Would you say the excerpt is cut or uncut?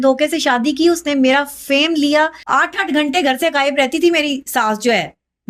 cut